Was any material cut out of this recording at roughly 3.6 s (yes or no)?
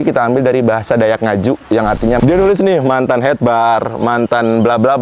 no